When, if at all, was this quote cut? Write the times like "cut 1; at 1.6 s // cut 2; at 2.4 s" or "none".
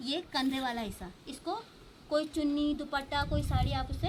none